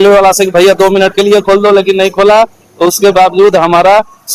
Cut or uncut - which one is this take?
uncut